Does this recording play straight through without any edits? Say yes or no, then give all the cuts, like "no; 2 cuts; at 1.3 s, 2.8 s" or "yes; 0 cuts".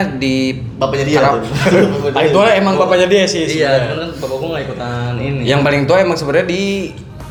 yes; 0 cuts